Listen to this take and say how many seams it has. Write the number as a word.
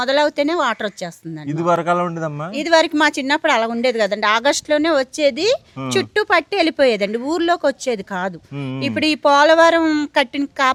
zero